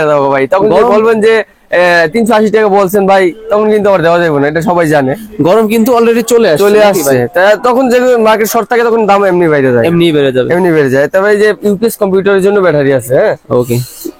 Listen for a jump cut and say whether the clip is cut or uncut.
uncut